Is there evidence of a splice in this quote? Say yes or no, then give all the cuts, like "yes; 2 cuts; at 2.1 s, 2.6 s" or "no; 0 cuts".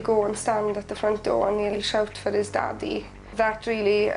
yes; 1 cut; at 1.7 s